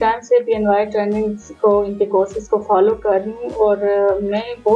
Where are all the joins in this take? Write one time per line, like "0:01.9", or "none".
none

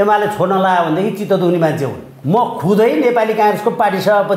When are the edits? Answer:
0:02.1

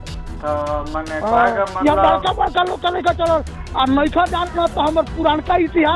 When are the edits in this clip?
none

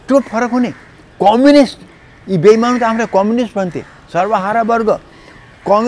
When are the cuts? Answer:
none

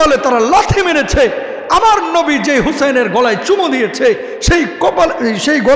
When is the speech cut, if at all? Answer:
none

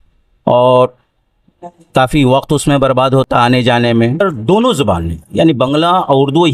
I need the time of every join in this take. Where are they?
0:04.2

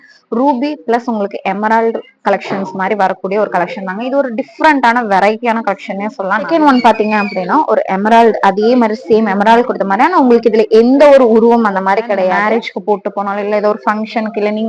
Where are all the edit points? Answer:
0:06.5
0:12.4

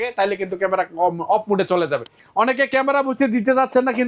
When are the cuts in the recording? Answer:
0:02.2

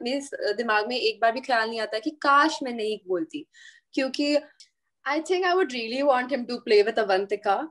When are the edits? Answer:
0:04.6

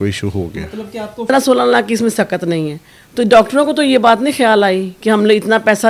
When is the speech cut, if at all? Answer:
0:01.3

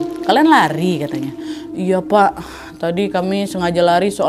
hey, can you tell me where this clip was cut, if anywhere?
none

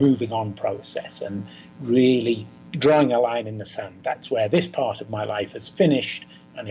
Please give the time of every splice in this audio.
none

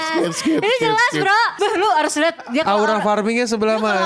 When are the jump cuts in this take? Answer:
0:01.5

